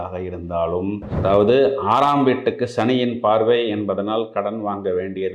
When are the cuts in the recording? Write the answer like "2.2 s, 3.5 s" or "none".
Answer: 1.1 s